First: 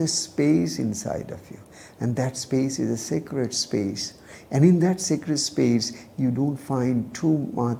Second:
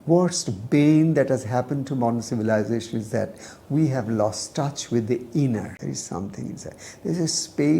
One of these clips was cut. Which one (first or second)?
second